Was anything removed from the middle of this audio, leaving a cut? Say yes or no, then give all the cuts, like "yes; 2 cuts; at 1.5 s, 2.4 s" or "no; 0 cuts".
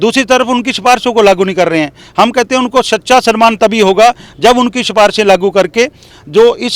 no; 0 cuts